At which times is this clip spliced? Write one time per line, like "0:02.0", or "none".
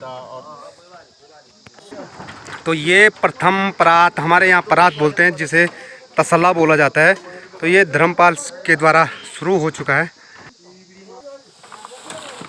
0:01.8
0:10.4